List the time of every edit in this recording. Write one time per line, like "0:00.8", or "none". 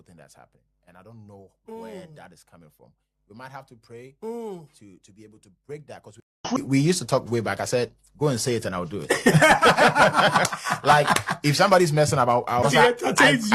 0:06.5
0:12.6

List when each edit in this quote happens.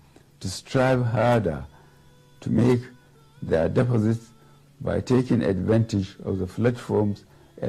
none

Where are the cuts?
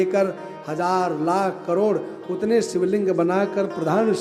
none

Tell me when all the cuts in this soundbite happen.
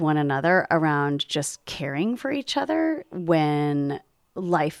none

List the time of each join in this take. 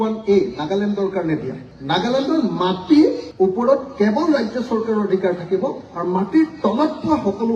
0:01.7

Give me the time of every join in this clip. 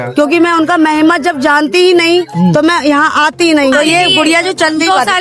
0:03.7

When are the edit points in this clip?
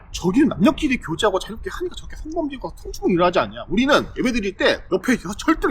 none

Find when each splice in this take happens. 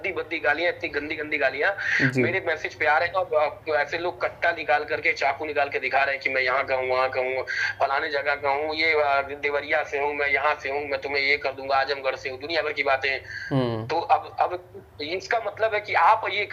none

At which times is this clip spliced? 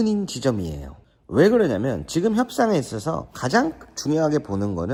none

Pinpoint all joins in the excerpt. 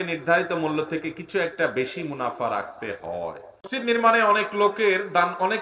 0:03.7

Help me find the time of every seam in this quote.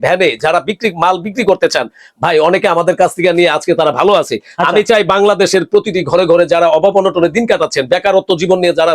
none

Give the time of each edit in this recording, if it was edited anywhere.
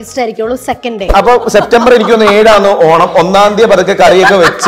0:01.0

